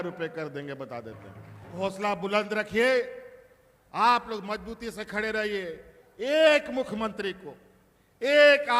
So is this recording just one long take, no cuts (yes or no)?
no